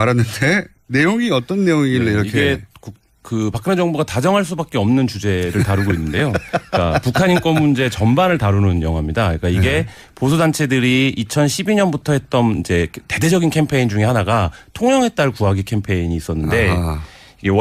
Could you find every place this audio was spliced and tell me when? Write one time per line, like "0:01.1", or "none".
0:05.0